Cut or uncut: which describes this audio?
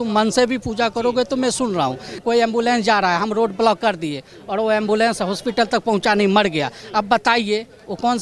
cut